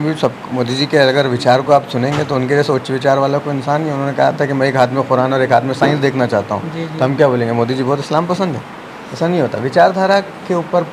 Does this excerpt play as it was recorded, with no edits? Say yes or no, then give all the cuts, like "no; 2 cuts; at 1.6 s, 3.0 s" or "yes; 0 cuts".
yes; 0 cuts